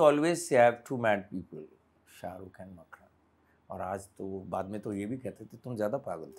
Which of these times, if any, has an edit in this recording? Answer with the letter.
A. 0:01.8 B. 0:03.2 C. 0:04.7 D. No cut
D